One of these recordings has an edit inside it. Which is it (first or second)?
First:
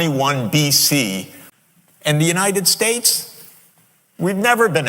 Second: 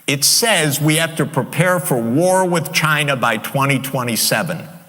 first